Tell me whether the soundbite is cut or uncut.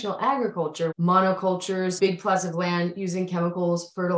cut